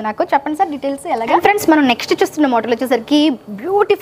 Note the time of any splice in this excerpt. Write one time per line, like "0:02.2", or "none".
0:01.4